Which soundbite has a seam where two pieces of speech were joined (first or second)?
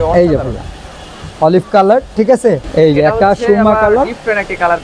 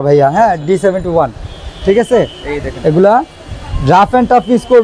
first